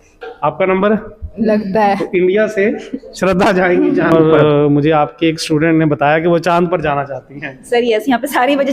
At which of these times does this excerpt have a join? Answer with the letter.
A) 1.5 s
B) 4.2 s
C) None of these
B